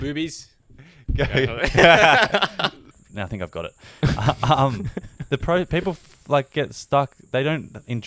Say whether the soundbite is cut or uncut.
cut